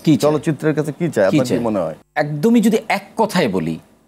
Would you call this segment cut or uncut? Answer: cut